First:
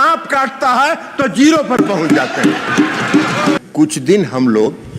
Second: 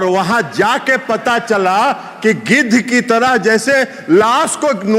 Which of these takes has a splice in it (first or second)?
first